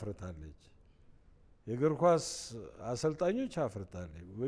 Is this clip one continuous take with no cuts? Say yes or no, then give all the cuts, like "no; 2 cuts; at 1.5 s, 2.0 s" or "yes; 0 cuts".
yes; 0 cuts